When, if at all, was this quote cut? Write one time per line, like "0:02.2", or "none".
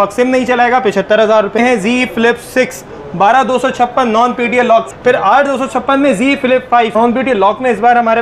0:01.6
0:04.9
0:06.9